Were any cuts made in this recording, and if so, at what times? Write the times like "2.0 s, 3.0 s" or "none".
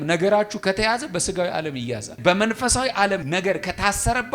2.2 s, 3.2 s